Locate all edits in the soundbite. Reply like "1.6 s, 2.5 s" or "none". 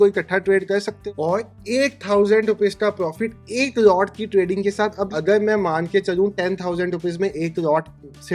1.0 s, 5.1 s